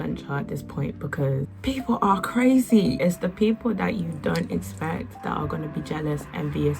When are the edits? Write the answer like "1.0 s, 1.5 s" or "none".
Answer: 1.5 s, 3.0 s, 5.2 s